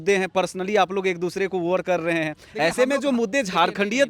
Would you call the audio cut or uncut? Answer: uncut